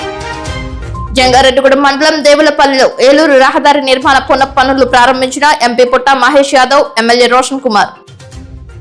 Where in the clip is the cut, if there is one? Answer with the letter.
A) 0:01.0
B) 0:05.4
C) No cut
A